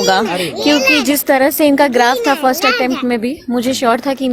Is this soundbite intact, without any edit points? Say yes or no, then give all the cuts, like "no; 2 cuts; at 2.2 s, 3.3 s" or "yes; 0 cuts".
yes; 0 cuts